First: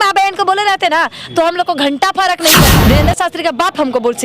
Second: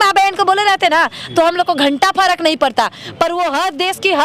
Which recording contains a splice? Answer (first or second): first